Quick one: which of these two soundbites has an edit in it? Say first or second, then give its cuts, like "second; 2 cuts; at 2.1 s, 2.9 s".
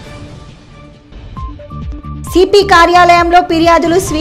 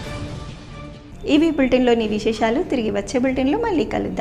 first; 2 cuts; at 1.0 s, 2.2 s